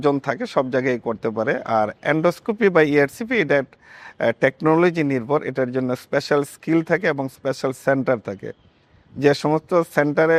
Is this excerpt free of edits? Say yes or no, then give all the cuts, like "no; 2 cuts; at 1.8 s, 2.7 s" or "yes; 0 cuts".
yes; 0 cuts